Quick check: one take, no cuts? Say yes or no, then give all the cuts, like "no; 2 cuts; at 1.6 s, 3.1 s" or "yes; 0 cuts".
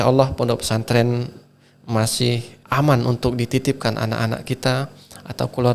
no; 1 cut; at 2.5 s